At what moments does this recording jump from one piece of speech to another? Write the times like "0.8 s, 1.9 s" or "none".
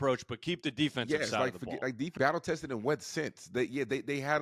2.1 s